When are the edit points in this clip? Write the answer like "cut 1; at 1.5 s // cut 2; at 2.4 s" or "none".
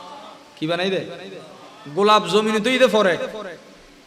none